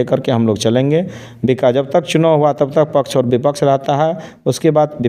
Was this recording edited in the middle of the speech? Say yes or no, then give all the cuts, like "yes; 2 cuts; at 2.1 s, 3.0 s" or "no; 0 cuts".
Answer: no; 0 cuts